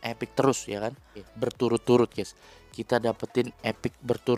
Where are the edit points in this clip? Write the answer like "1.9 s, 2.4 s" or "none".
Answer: 1.2 s